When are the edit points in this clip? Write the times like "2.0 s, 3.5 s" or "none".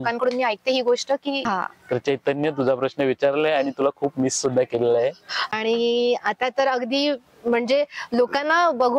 1.4 s, 5.4 s

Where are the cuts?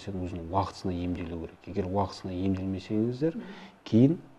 none

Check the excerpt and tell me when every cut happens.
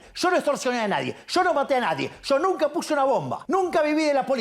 3.4 s

